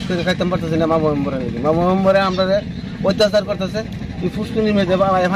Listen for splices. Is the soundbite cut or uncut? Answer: uncut